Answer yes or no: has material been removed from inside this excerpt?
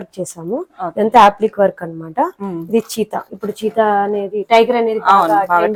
no